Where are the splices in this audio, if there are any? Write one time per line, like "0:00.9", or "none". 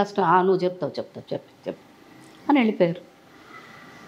none